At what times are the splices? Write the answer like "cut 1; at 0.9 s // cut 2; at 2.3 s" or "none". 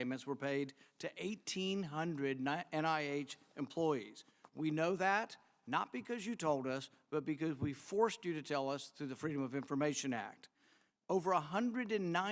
none